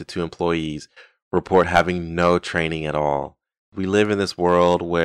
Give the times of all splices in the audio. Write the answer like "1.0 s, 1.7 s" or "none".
3.8 s